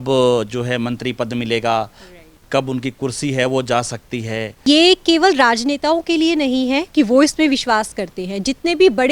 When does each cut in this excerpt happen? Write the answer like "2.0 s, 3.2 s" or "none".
4.6 s